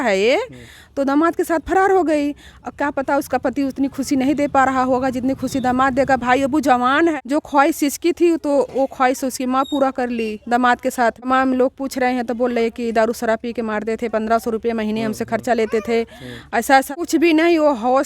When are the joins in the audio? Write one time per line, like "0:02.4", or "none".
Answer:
0:07.1
0:11.3
0:16.9